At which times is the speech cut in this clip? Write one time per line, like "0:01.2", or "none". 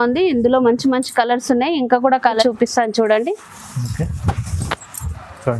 0:02.4

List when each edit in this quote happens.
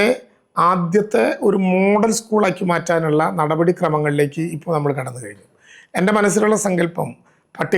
none

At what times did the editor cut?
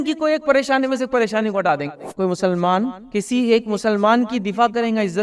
0:02.0
0:03.0

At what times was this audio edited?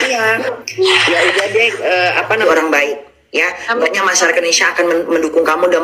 0:02.4

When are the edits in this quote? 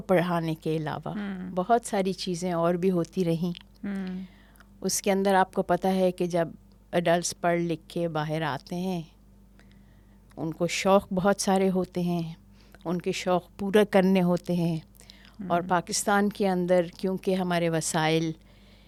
none

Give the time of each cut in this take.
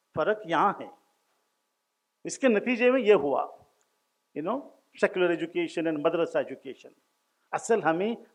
none

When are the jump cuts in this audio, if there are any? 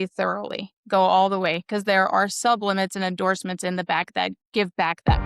none

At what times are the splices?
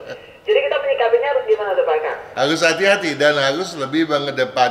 0:02.2

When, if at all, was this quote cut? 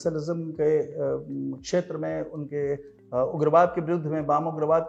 none

